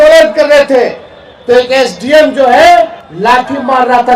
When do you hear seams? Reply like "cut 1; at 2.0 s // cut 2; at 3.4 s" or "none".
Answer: cut 1; at 3.0 s